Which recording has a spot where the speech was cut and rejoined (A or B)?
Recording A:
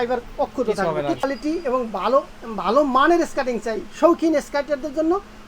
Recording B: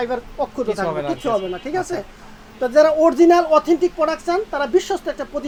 A